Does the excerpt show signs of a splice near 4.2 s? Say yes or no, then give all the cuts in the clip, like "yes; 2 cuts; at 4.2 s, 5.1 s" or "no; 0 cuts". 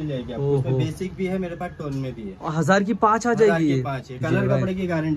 yes; 1 cut; at 4.2 s